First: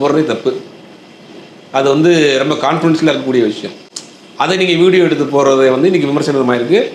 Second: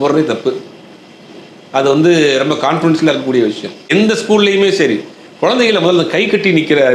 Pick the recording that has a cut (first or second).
second